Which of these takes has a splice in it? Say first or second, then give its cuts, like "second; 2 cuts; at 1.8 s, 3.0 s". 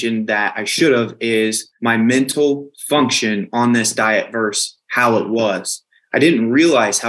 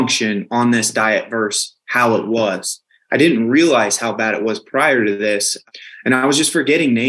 first; 1 cut; at 1.7 s